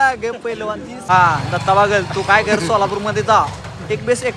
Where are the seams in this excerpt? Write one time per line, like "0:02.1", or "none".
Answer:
0:01.1